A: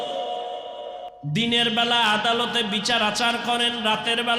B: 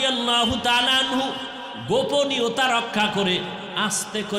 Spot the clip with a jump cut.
A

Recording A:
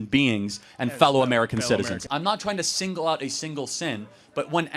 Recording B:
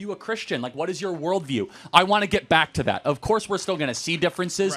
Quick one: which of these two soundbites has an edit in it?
A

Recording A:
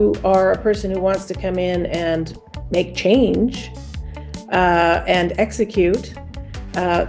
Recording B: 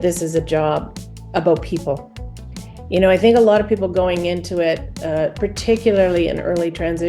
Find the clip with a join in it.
B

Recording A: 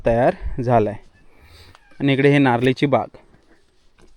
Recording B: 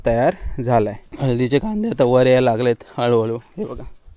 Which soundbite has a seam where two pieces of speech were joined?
B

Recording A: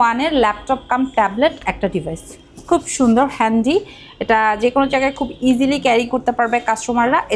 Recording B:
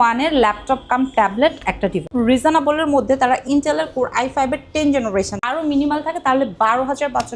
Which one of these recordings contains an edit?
B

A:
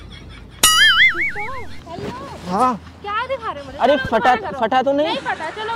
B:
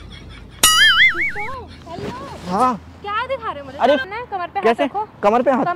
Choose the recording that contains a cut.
B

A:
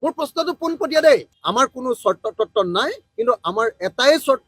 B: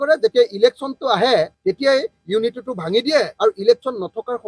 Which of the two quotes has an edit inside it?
A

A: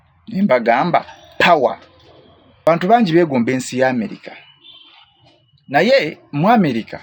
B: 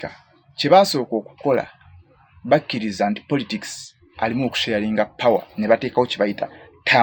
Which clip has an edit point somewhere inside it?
A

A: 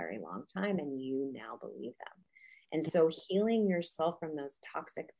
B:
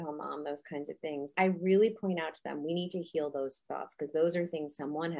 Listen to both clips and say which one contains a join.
B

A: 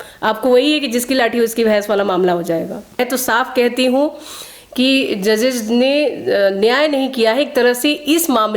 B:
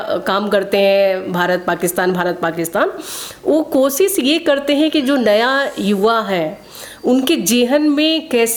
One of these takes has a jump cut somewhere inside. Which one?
A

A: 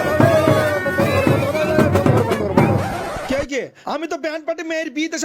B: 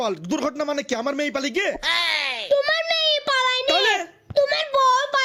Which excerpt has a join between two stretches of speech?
A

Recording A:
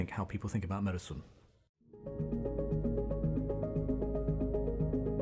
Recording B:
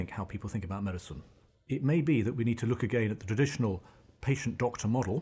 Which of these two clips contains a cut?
B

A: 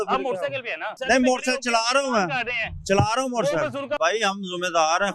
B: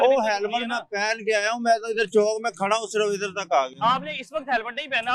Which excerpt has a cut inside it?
A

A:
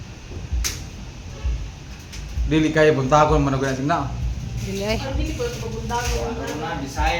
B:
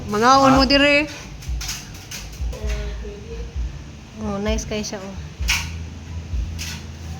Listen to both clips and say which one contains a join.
B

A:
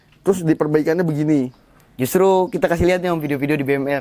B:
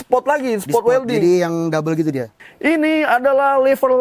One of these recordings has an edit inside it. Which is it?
B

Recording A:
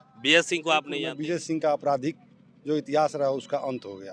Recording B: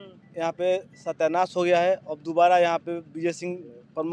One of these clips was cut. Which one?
A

